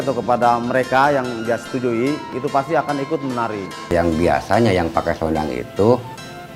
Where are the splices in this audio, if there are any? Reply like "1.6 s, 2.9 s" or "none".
3.9 s